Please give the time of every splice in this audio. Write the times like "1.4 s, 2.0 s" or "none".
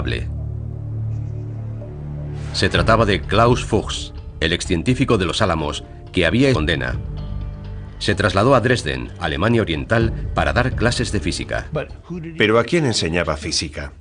none